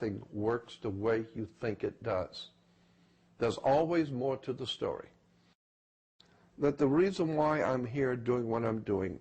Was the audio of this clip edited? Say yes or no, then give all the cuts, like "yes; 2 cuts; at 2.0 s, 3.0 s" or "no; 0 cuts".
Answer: yes; 1 cut; at 5.9 s